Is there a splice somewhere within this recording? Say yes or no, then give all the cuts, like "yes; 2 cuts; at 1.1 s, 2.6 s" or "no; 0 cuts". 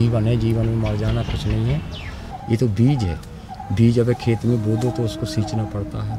yes; 1 cut; at 2.0 s